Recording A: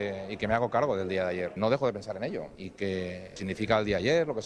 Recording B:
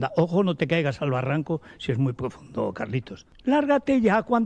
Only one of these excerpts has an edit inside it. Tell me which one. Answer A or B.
A